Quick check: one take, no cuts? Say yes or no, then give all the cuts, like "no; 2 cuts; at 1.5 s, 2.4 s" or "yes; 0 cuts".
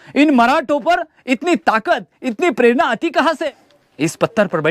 no; 1 cut; at 3.4 s